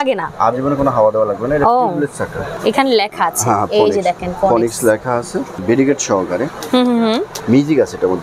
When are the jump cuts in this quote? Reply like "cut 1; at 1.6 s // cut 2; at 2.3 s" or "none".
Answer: cut 1; at 2.4 s // cut 2; at 5.6 s // cut 3; at 7.3 s